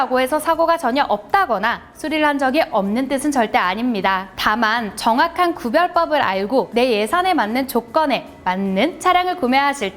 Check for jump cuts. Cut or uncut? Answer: uncut